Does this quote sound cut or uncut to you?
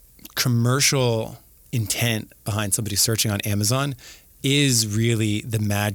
uncut